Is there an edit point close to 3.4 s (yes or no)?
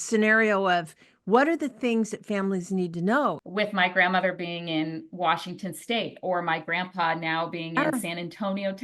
yes